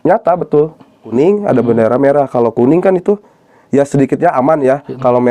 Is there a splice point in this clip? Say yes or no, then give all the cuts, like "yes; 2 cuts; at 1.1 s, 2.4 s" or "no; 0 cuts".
yes; 1 cut; at 1.1 s